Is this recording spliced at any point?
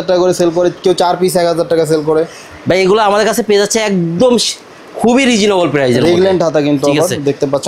no; 0 cuts

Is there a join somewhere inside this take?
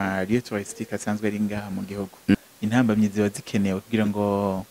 yes; 1 cut; at 2.3 s

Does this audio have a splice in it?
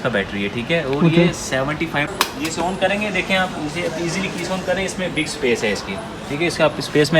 yes; 1 cut; at 2.1 s

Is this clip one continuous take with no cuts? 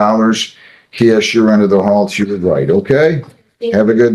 yes; 0 cuts

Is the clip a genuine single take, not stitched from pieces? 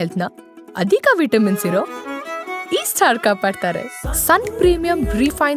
yes; 0 cuts

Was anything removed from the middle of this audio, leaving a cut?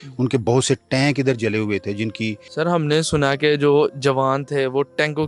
yes; 1 cut; at 2.4 s

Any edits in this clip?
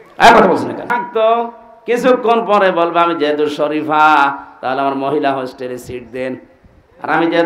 yes; 1 cut; at 0.9 s

